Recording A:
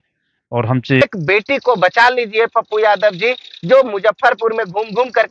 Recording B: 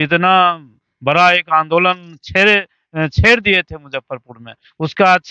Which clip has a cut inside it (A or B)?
A